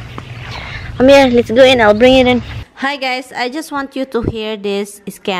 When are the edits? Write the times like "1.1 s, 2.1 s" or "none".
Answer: 2.6 s